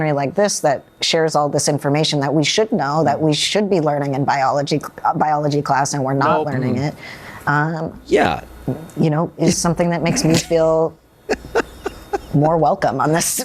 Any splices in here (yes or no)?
no